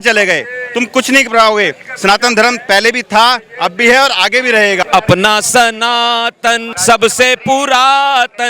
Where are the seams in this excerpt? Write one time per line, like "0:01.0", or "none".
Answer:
0:04.8
0:06.7